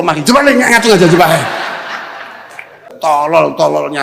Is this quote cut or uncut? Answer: cut